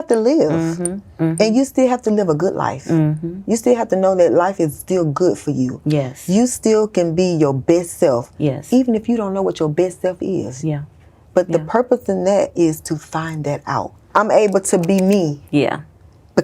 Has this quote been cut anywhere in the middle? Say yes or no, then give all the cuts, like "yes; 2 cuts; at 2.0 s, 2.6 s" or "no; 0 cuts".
yes; 1 cut; at 13.9 s